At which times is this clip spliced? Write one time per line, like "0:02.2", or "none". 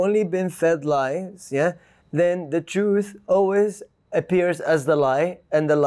none